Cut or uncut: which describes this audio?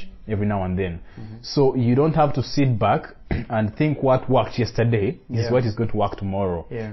uncut